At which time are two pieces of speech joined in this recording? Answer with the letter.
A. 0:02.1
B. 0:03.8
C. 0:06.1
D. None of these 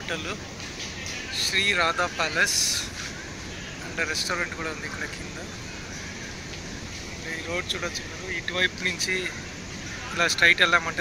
D